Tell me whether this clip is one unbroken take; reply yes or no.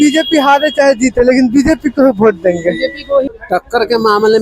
no